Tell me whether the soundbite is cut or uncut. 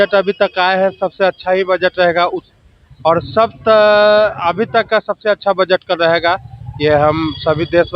uncut